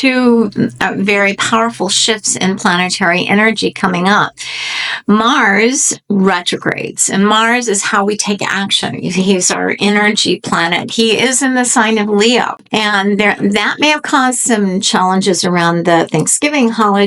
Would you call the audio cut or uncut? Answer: uncut